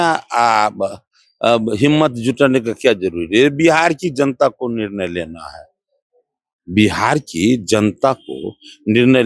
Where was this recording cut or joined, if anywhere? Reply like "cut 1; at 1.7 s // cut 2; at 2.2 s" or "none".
none